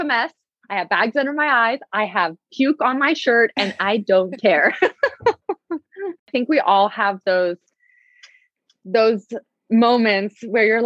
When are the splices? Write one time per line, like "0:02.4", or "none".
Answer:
0:06.2